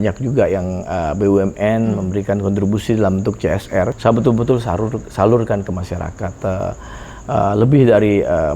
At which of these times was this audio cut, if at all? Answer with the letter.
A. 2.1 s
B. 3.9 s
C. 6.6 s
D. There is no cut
B